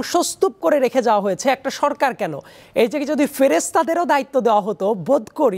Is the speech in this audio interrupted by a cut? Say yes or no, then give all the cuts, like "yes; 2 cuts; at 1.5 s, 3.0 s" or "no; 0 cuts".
no; 0 cuts